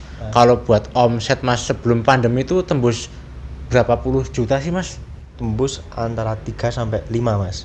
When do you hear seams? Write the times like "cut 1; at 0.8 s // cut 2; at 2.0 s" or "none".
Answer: cut 1; at 5.3 s